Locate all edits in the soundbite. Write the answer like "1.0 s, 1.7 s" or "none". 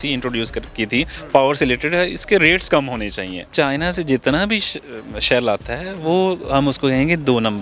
3.5 s